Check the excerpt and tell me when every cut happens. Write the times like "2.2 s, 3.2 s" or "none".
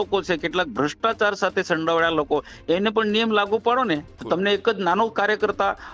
4.1 s